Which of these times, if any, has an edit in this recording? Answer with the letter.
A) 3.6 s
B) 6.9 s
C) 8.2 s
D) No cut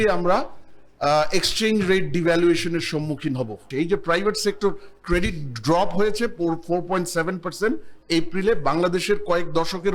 A